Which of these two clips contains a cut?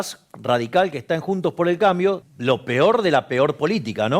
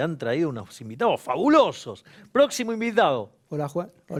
first; 1 cut; at 2.3 s

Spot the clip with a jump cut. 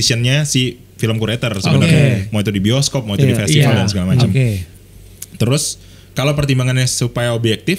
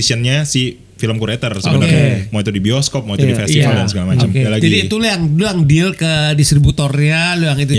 second; 1 cut; at 4.5 s

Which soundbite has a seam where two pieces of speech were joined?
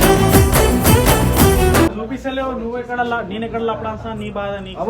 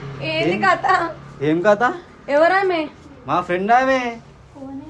first; 1 cut; at 1.9 s

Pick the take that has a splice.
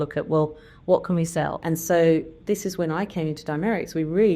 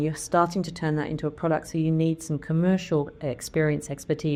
first; 1 cut; at 1.6 s

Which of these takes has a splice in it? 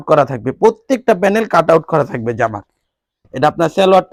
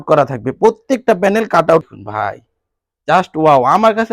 second; 1 cut; at 1.9 s

